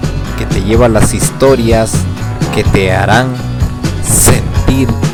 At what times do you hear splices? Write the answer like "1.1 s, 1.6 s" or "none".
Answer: none